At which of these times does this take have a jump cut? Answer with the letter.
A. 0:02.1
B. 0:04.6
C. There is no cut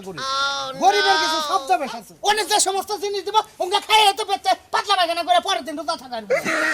A